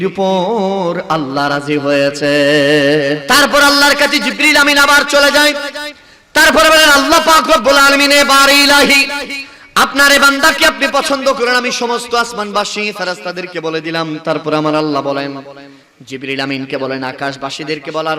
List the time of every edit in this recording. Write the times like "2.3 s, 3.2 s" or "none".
3.2 s